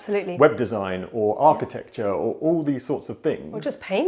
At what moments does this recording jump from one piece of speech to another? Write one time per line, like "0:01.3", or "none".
none